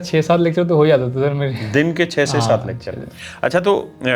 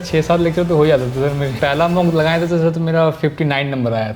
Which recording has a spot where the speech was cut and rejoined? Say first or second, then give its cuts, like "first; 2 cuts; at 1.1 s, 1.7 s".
second; 1 cut; at 1.6 s